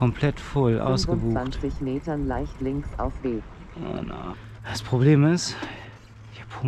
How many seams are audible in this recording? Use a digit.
1